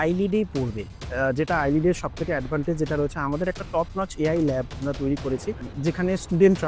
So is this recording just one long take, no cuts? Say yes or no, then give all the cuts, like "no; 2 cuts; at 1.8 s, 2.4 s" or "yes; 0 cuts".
no; 2 cuts; at 1.0 s, 5.7 s